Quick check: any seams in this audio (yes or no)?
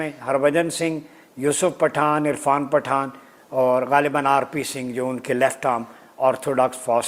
no